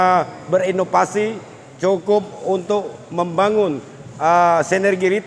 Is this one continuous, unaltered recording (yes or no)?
yes